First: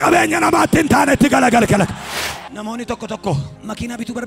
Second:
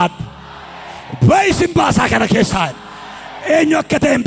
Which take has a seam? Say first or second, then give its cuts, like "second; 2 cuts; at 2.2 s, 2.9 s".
first; 1 cut; at 2.4 s